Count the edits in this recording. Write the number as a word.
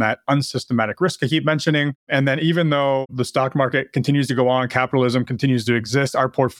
two